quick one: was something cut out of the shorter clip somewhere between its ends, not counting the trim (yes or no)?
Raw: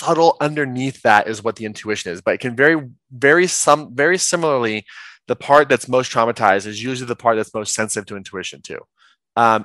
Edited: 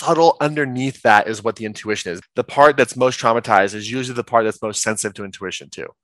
yes